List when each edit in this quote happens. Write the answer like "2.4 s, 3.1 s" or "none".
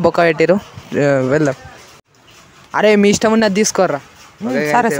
2.0 s